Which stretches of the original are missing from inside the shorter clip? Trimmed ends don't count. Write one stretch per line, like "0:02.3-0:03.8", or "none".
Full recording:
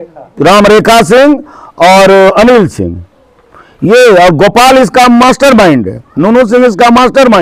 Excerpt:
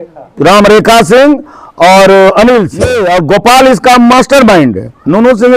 0:03.0-0:04.1

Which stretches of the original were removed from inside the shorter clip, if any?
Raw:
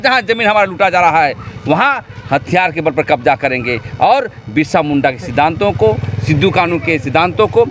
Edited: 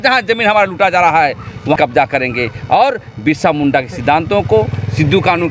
0:01.8-0:03.1

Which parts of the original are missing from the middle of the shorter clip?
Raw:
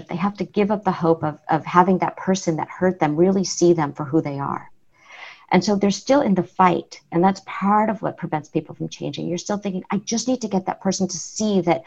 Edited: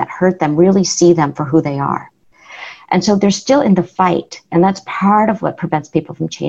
none

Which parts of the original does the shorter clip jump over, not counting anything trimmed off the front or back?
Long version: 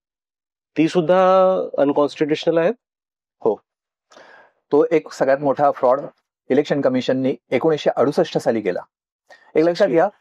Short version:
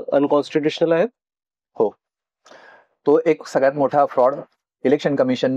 none

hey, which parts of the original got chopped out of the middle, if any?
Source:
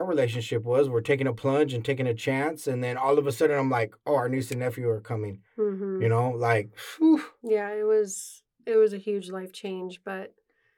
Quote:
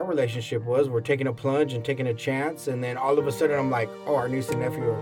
none

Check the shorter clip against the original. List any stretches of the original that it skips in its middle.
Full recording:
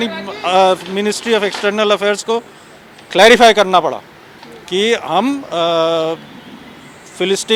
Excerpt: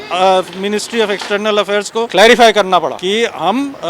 0:02.4-0:03.1
0:04.0-0:04.7

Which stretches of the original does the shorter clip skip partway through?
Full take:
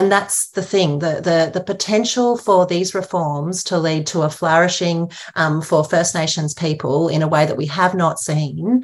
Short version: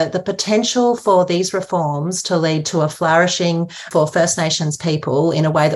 0:05.3-0:05.6

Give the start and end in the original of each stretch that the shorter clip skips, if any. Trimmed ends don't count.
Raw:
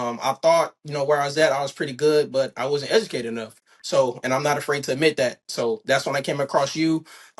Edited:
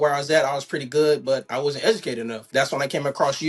0:03.5-0:05.8

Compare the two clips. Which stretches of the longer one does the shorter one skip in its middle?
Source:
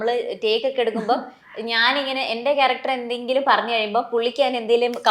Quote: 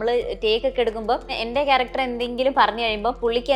0:01.3-0:02.2

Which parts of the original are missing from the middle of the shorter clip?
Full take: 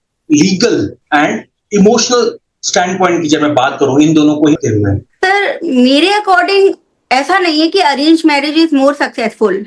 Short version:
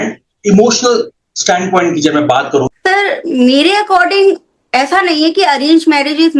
0:03.9-0:05.0

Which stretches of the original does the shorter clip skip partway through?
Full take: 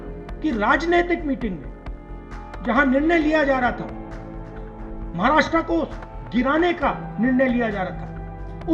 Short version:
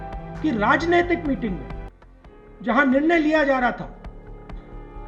none

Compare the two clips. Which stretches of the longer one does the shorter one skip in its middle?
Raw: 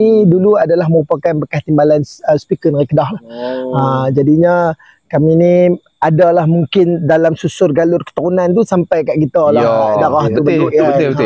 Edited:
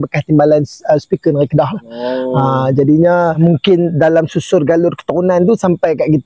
0:04.8-0:06.5

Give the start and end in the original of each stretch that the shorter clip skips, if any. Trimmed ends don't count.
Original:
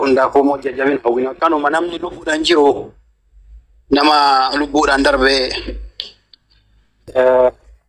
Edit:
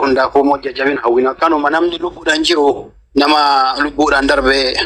0:02.9-0:03.7

